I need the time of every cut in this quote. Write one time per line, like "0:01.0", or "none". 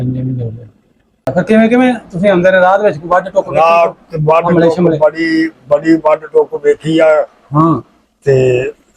0:01.3